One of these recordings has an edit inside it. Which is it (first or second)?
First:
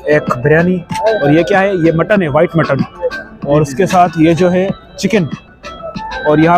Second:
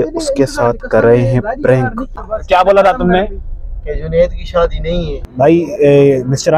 second